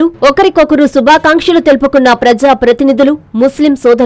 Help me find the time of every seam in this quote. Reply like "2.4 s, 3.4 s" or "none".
none